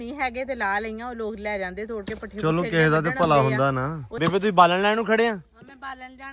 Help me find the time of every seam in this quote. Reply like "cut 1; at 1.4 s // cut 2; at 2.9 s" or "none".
cut 1; at 4.1 s